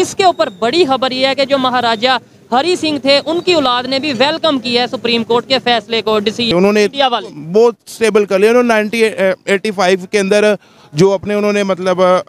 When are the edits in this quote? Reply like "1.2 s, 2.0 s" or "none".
6.5 s